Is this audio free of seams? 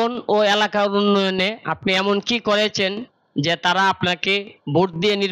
yes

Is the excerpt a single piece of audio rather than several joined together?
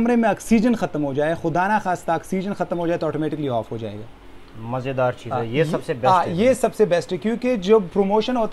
yes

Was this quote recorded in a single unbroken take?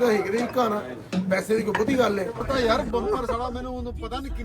no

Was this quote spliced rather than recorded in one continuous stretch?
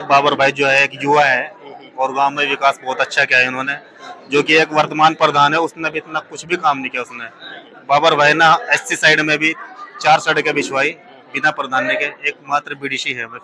no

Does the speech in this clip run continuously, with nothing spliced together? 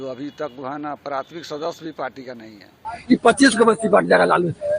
no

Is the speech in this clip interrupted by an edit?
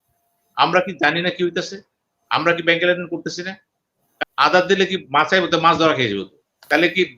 yes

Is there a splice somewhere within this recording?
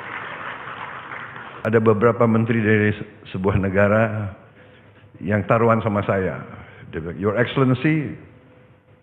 yes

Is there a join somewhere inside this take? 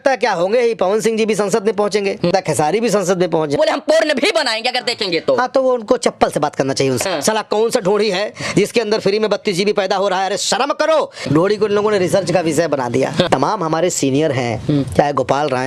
yes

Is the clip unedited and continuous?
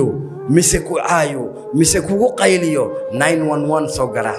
yes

